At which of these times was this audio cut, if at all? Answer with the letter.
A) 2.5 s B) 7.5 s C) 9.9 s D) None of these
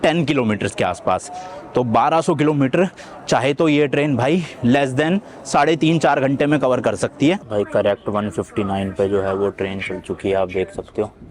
B